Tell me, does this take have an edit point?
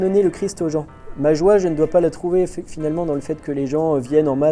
no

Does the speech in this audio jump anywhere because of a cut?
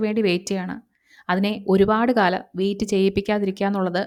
no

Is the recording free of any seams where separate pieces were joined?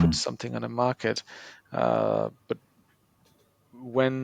yes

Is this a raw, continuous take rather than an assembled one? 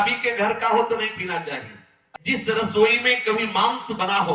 no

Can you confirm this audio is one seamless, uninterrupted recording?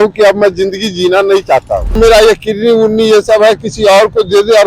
no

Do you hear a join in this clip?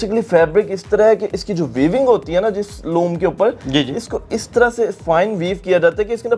no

